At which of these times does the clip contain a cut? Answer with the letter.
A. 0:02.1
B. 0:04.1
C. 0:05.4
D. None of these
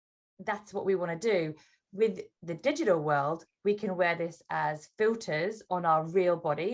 A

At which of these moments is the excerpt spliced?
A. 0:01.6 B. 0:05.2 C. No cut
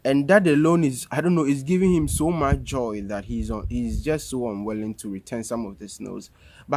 C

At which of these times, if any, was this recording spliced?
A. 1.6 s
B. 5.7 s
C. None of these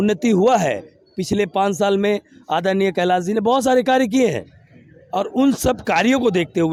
C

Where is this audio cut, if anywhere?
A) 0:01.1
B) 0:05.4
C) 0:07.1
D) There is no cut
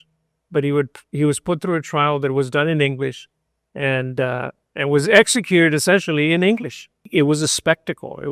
C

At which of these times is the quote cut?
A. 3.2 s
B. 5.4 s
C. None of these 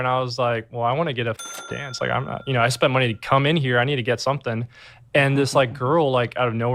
C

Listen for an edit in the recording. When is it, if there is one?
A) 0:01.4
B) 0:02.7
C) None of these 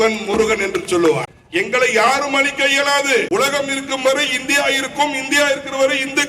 A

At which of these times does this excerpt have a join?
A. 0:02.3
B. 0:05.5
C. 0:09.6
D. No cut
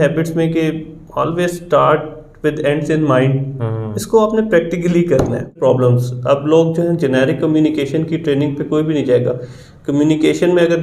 B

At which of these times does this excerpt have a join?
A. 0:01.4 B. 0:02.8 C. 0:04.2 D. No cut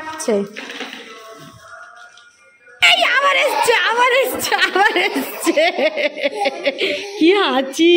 B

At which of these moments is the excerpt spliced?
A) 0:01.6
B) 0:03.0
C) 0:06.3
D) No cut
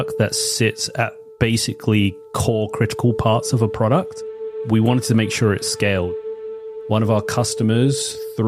C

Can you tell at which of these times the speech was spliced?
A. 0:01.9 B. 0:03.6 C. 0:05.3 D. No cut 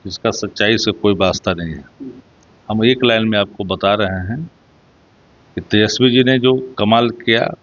D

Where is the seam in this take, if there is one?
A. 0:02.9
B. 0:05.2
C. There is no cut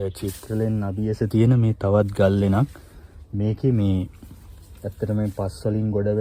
C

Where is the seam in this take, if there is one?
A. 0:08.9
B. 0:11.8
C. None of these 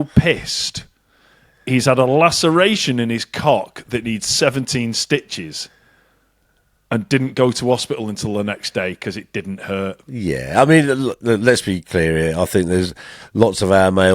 C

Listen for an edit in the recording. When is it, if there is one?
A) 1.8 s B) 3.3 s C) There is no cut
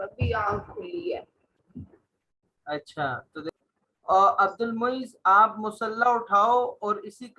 B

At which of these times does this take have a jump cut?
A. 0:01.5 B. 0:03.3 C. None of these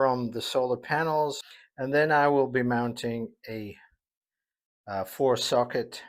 A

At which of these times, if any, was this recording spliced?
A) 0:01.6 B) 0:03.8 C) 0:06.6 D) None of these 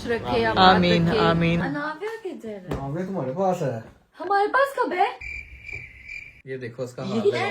A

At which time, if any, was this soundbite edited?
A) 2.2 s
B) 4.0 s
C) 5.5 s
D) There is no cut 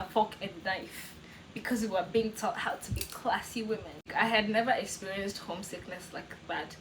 B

